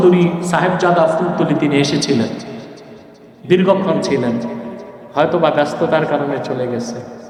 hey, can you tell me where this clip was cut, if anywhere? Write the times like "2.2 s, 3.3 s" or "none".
none